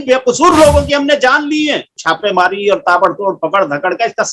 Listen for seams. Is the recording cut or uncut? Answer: cut